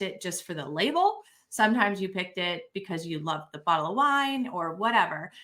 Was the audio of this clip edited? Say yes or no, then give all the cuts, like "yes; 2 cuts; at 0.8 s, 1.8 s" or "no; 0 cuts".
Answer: no; 0 cuts